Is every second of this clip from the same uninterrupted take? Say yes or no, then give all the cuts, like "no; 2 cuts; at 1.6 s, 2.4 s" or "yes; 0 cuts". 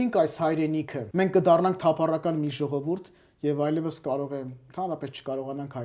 no; 1 cut; at 1.0 s